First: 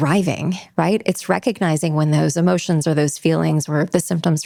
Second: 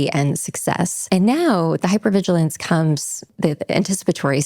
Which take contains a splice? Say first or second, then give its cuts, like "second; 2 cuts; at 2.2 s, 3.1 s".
second; 2 cuts; at 1.0 s, 3.3 s